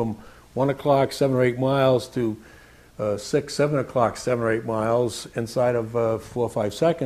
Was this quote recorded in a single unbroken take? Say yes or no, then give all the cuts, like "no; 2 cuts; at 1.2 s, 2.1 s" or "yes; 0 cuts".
yes; 0 cuts